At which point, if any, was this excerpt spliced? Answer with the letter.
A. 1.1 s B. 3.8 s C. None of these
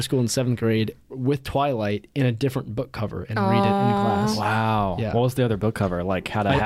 A